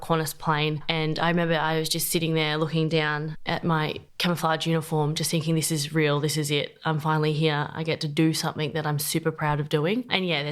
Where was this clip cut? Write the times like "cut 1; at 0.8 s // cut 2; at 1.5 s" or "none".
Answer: none